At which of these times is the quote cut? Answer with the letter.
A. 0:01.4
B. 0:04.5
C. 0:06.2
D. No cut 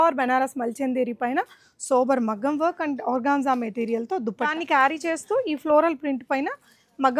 B